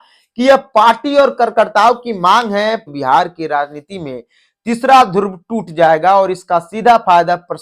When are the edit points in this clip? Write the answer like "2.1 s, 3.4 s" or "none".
2.8 s